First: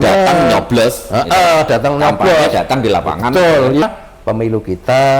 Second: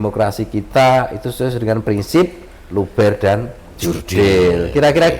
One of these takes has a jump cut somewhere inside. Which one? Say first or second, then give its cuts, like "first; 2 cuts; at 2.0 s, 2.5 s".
first; 1 cut; at 3.8 s